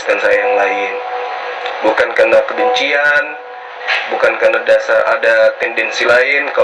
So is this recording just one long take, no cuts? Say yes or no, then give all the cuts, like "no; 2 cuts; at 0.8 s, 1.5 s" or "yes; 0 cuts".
yes; 0 cuts